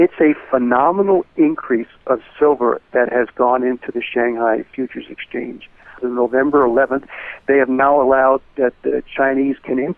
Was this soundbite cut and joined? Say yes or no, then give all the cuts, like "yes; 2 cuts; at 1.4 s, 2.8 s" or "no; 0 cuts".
yes; 1 cut; at 6.0 s